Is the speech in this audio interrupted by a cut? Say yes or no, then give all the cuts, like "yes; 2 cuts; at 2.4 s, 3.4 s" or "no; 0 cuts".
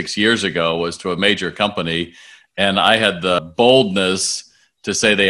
yes; 1 cut; at 3.4 s